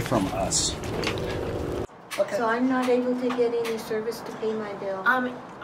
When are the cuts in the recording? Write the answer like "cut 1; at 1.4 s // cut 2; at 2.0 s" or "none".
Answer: cut 1; at 1.8 s